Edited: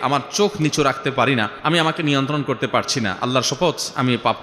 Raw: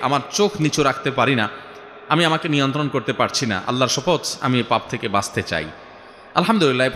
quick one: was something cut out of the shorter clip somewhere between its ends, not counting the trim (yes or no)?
yes